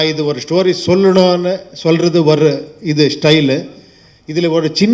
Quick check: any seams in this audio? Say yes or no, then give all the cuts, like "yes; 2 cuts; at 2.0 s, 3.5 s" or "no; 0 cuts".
no; 0 cuts